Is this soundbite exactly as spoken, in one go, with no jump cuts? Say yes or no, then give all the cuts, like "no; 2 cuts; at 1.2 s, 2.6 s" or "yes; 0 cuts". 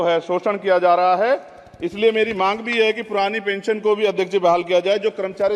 yes; 0 cuts